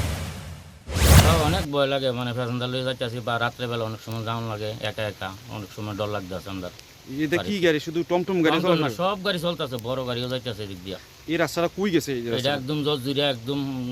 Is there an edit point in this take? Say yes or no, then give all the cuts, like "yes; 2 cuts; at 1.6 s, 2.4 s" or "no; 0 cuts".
yes; 1 cut; at 1.3 s